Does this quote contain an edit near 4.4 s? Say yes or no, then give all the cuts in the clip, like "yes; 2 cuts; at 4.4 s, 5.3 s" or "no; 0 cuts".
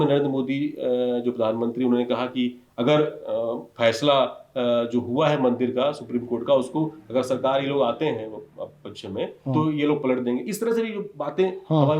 no; 0 cuts